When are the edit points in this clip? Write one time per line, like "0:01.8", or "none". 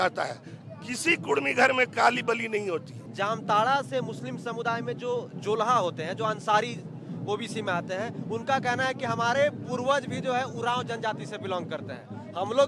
0:03.0